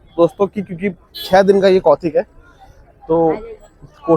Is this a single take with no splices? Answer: yes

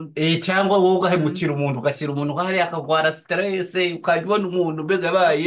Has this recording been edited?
no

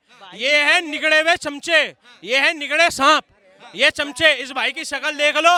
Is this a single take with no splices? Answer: yes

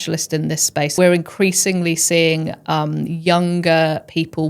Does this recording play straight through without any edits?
no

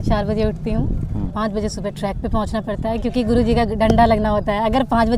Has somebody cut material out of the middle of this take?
yes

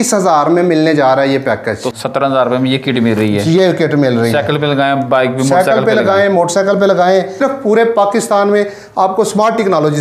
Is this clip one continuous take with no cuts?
no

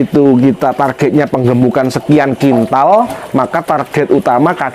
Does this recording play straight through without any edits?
yes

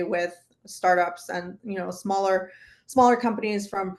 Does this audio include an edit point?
no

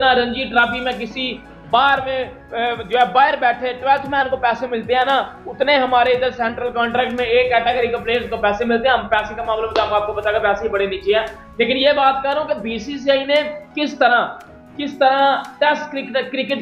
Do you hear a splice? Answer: no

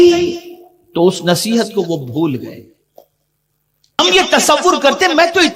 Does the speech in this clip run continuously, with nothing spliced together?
no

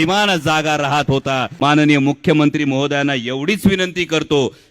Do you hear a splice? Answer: yes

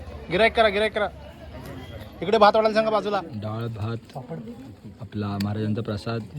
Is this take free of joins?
no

